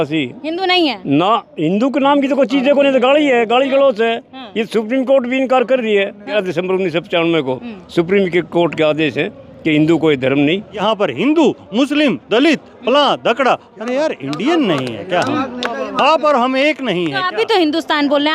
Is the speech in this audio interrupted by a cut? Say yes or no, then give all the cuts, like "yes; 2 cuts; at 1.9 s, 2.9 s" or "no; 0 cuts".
yes; 2 cuts; at 6.3 s, 10.7 s